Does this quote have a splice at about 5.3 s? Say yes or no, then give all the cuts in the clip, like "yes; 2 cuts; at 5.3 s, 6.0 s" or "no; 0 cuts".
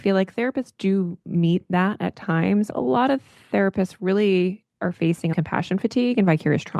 yes; 2 cuts; at 2.7 s, 5.3 s